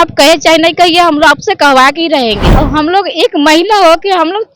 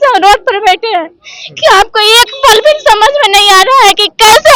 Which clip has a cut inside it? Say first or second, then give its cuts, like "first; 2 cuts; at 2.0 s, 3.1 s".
first; 1 cut; at 2.5 s